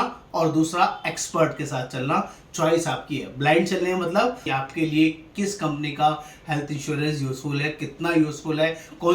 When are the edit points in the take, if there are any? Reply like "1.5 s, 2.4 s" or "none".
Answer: 4.5 s